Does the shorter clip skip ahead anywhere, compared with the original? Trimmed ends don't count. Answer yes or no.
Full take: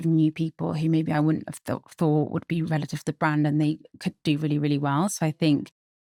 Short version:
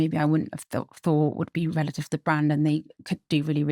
no